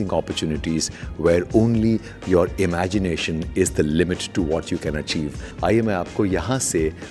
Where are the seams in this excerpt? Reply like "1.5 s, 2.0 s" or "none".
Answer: 5.4 s